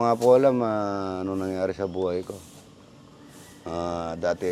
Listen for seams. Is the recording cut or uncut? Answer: uncut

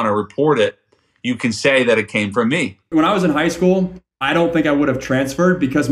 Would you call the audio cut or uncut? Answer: cut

